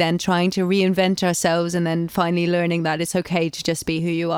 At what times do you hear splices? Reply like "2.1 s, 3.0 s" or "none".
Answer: none